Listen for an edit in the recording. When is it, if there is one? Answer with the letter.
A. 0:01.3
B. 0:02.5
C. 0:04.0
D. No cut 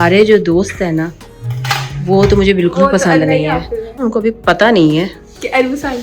C